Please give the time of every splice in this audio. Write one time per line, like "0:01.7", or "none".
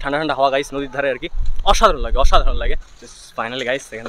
none